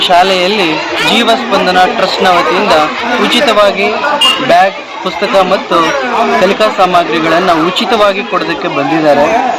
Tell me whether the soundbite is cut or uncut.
uncut